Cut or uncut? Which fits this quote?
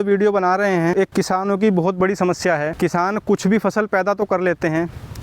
cut